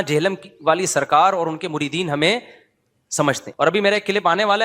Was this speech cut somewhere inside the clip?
yes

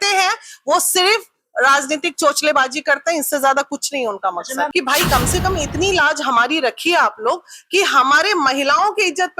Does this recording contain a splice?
yes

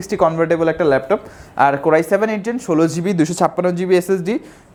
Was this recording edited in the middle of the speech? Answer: no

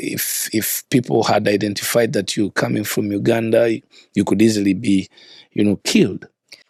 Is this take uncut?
yes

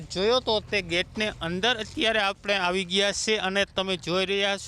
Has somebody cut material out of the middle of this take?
no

